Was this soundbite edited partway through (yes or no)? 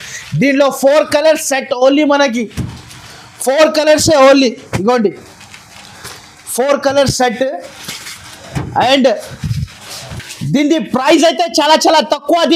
no